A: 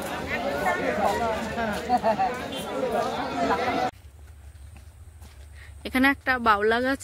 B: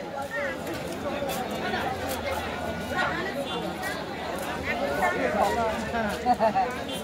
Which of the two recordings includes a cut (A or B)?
A